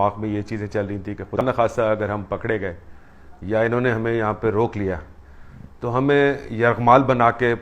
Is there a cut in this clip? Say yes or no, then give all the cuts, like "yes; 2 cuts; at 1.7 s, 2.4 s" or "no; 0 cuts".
yes; 1 cut; at 1.4 s